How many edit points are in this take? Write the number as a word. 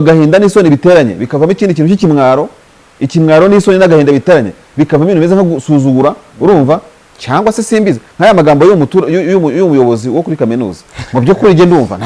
zero